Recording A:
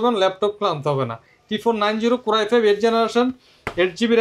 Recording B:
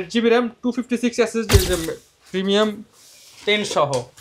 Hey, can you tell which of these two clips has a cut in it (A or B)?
B